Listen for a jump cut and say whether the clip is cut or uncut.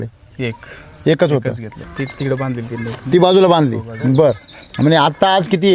cut